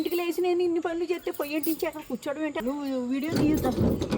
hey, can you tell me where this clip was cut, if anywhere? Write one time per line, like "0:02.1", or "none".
0:02.6